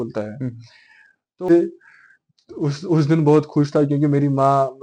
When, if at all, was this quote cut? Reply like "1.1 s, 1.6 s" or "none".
1.5 s